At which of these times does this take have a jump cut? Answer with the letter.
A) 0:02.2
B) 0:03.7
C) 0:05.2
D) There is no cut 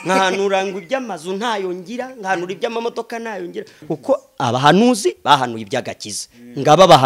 B